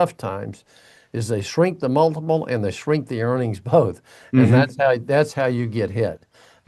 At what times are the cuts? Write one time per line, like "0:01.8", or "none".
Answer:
none